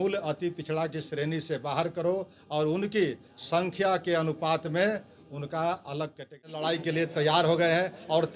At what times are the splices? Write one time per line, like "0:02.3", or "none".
0:06.6